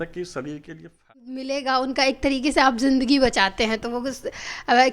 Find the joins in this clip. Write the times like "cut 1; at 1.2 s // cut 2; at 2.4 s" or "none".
cut 1; at 1.1 s